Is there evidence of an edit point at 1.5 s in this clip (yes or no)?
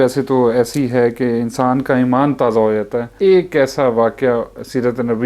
no